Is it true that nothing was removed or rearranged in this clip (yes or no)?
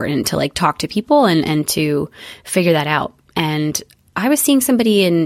yes